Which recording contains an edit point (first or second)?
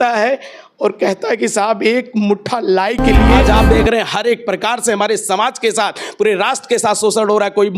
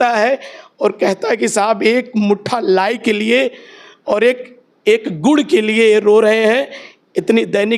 first